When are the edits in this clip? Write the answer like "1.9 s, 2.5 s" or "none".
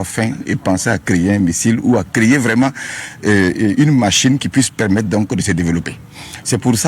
4.3 s